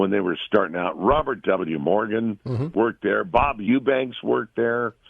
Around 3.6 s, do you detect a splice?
yes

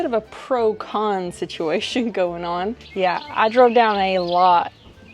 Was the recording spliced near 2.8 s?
yes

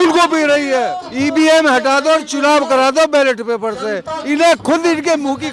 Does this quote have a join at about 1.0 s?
yes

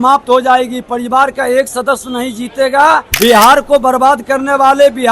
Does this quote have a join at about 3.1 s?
yes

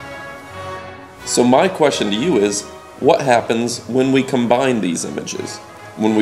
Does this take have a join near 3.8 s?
yes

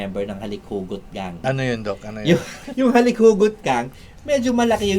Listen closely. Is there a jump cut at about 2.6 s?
yes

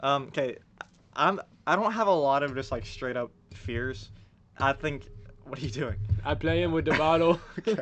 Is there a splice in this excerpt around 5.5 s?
no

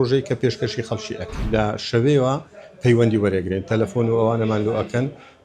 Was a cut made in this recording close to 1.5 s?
yes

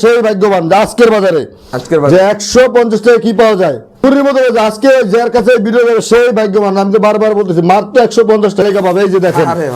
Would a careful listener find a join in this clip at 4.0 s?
yes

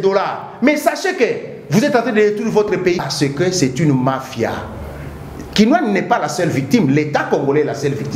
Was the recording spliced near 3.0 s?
yes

